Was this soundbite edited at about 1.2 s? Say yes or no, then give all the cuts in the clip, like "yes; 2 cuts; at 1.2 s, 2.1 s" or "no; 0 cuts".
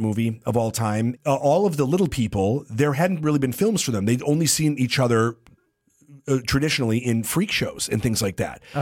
yes; 1 cut; at 1.2 s